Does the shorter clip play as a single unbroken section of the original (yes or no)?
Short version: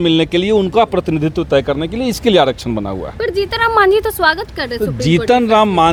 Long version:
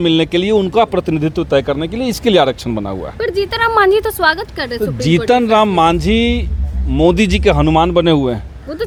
yes